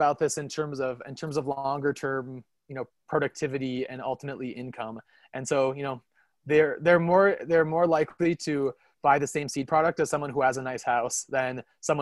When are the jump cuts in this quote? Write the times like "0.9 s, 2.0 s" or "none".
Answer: none